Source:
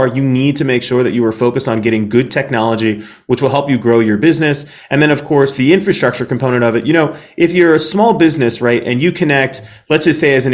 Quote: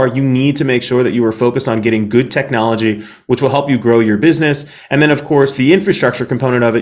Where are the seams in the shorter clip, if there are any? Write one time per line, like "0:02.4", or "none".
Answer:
none